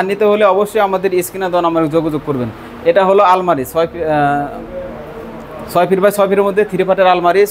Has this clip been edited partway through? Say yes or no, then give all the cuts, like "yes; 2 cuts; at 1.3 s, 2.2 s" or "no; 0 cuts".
no; 0 cuts